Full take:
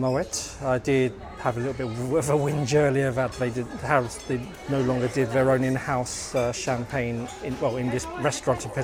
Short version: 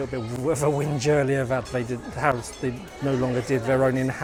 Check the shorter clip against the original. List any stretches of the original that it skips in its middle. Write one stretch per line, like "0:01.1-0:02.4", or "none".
none